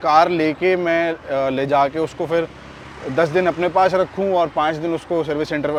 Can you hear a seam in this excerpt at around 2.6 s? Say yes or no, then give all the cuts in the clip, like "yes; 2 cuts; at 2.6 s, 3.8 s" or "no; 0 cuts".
no; 0 cuts